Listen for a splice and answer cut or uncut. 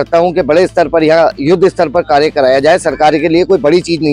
uncut